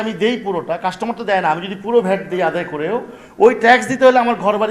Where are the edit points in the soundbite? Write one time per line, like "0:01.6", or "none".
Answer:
none